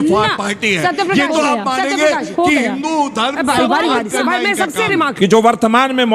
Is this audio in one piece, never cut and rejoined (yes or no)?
no